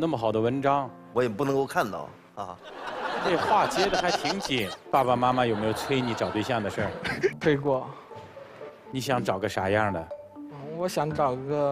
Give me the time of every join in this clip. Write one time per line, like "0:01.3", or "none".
0:03.2
0:04.7